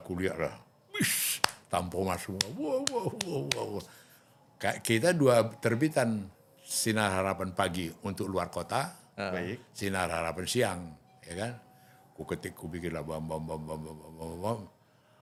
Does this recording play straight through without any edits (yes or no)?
yes